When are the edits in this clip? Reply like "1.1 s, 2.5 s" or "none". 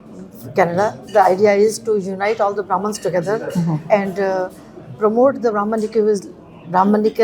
none